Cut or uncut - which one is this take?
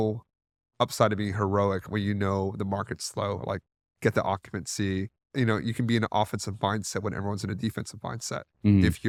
uncut